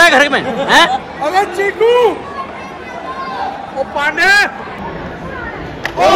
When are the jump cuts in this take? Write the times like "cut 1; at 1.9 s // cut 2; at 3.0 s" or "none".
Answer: cut 1; at 4.9 s